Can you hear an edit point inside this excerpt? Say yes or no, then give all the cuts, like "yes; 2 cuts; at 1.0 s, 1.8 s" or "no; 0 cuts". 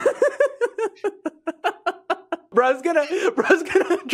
yes; 1 cut; at 2.5 s